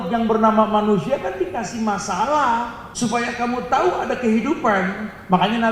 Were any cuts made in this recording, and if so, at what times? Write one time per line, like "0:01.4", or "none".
0:02.8